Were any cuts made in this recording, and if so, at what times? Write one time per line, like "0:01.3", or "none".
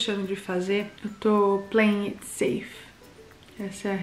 0:00.9